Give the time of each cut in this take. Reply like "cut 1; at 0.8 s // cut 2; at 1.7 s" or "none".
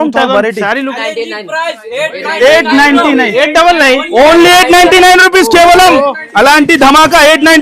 cut 1; at 1.0 s